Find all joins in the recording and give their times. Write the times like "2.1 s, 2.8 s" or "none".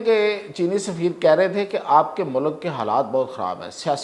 none